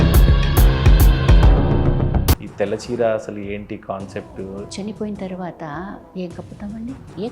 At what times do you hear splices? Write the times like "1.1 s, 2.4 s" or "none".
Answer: 2.3 s